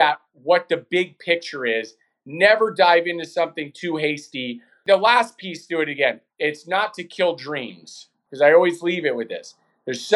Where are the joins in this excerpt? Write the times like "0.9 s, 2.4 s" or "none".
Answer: 4.7 s, 8.2 s